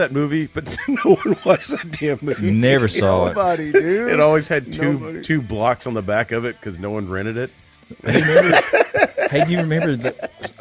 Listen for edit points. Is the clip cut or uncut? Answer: uncut